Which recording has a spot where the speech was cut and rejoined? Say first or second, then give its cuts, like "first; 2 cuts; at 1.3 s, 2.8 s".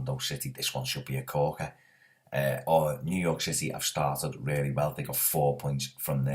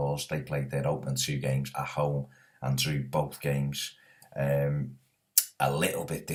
first; 1 cut; at 4.5 s